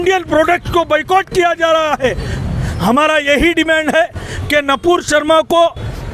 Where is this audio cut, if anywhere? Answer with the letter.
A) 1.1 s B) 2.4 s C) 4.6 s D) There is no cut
B